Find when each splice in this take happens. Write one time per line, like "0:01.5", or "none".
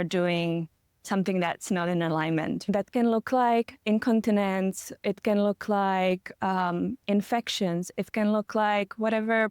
0:02.6
0:03.7